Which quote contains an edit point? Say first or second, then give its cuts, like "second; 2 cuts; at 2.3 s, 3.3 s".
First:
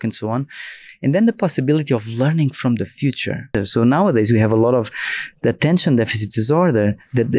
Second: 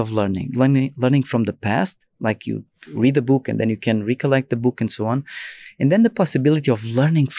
first; 1 cut; at 3.6 s